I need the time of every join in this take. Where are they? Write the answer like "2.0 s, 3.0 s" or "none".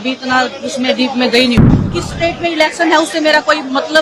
1.6 s